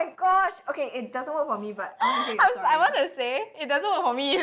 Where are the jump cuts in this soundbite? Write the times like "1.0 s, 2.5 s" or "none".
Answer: none